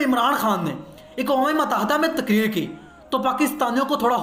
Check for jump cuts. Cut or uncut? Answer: uncut